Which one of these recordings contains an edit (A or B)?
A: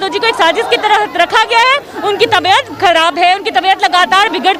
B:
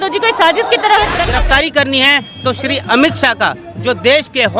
B